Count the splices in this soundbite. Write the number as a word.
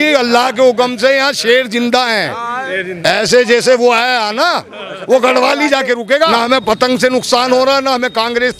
one